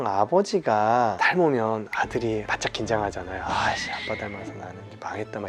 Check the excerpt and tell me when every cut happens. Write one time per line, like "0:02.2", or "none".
0:01.2